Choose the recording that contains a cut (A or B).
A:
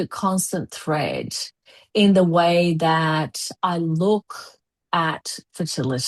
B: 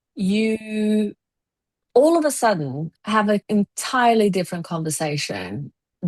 B